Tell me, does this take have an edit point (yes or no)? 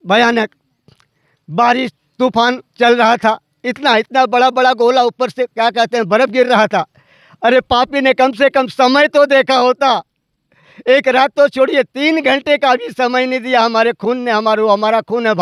no